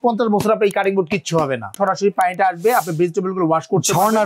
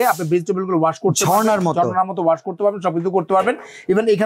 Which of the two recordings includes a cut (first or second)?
first